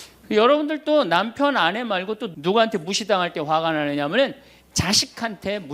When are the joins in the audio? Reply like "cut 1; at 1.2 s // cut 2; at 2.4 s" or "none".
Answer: cut 1; at 2.3 s

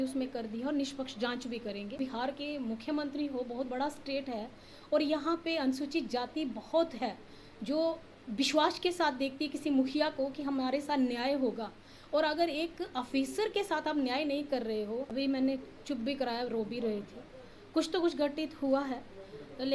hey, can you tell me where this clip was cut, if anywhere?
cut 1; at 2.0 s // cut 2; at 15.1 s

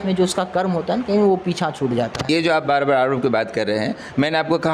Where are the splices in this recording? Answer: cut 1; at 2.2 s

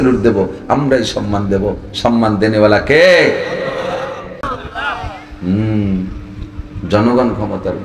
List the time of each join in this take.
cut 1; at 4.4 s

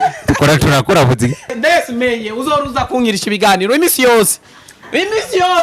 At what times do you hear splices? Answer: cut 1; at 1.6 s

